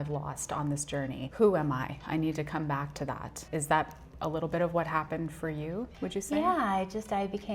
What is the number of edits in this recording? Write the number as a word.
three